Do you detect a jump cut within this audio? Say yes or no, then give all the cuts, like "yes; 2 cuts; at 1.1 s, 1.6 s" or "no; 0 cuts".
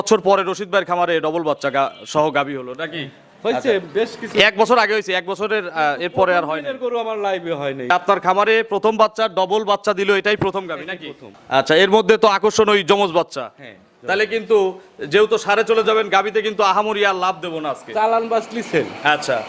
yes; 2 cuts; at 7.9 s, 11.3 s